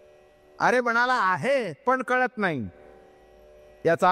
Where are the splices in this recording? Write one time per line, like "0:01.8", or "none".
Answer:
none